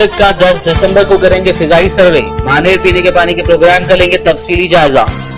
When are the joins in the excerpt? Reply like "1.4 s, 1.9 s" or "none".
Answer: none